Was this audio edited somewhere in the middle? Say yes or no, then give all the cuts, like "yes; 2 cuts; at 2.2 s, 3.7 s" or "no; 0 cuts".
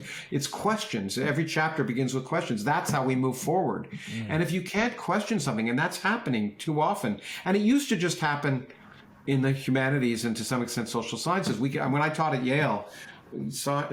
no; 0 cuts